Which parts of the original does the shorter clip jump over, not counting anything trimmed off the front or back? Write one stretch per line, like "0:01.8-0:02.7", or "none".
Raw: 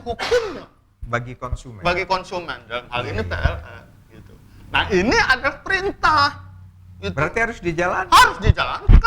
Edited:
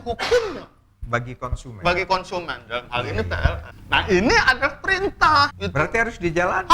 0:03.7-0:04.5
0:06.4-0:07.0